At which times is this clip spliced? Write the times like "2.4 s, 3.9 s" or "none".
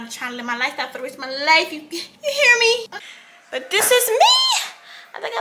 2.9 s